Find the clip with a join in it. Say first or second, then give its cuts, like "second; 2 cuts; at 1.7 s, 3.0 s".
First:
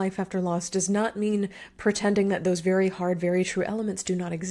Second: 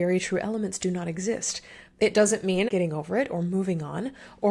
second; 1 cut; at 2.7 s